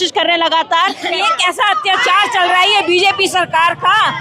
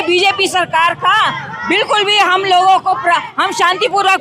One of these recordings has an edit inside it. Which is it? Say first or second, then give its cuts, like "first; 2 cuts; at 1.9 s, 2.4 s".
first; 1 cut; at 1.1 s